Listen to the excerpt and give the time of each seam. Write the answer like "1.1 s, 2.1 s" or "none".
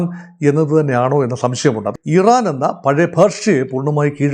1.9 s

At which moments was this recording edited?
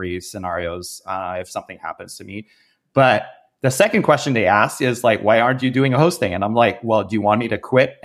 none

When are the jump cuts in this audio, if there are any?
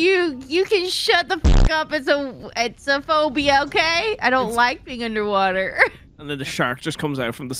6.1 s

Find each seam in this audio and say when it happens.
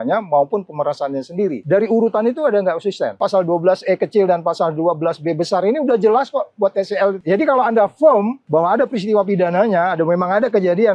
1.6 s, 3.2 s, 7.2 s, 8.4 s

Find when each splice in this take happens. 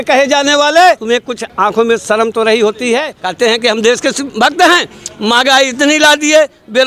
1.2 s, 3.2 s, 4.2 s

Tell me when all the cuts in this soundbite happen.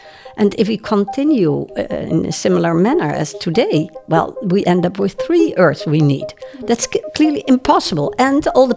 none

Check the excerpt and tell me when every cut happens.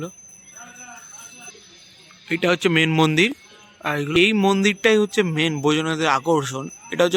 1.5 s, 4.1 s

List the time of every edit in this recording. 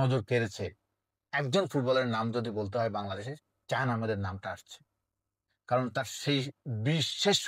none

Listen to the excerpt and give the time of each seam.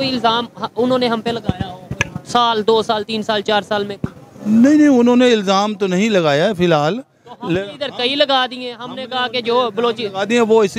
none

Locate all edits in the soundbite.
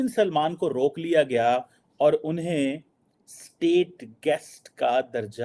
none

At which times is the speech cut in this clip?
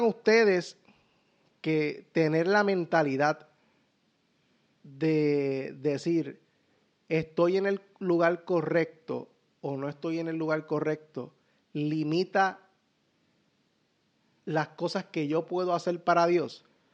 none

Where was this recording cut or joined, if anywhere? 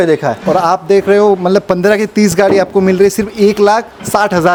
none

